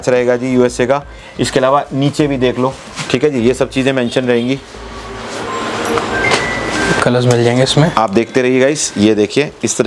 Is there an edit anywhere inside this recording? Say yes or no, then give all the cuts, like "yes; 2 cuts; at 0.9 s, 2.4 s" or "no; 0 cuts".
no; 0 cuts